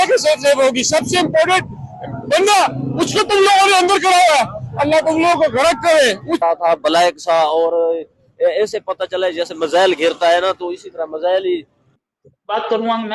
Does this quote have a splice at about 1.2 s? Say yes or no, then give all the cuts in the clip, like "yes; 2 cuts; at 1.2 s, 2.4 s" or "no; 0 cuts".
no; 2 cuts; at 6.4 s, 11.8 s